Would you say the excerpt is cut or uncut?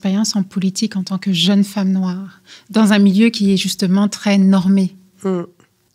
uncut